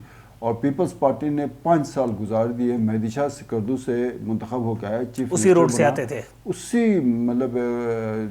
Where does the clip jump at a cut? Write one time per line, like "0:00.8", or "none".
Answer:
none